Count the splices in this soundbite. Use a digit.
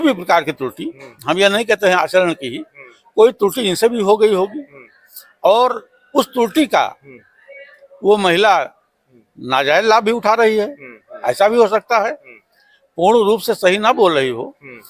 0